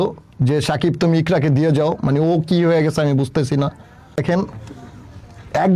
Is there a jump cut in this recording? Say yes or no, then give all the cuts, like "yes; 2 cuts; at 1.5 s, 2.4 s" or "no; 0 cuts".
yes; 1 cut; at 4.2 s